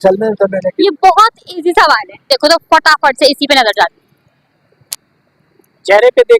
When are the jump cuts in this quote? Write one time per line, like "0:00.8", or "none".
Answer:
0:02.3